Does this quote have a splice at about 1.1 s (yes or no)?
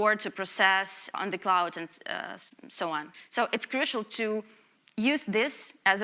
yes